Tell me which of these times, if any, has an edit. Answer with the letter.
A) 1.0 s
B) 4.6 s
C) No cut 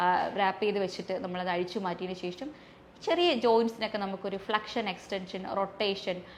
C